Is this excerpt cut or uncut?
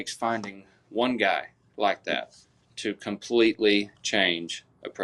uncut